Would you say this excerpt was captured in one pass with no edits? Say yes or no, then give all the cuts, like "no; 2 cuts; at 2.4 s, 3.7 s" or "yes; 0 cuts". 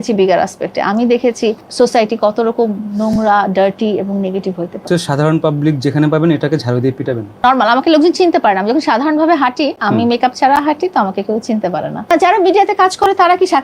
no; 4 cuts; at 1.6 s, 4.8 s, 7.4 s, 12.1 s